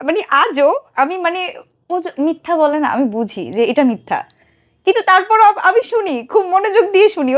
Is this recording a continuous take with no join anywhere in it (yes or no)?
yes